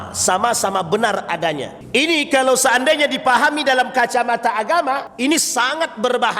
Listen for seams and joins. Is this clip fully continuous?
no; 2 cuts; at 1.7 s, 5.1 s

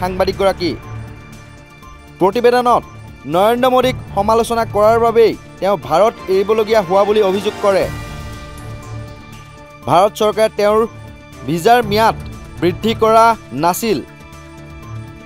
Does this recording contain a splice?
yes; 3 cuts; at 7.9 s, 9.9 s, 14.1 s

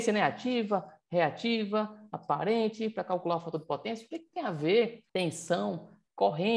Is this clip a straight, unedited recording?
no; 1 cut; at 5.0 s

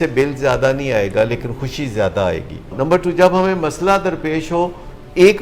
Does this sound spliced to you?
yes; 1 cut; at 2.7 s

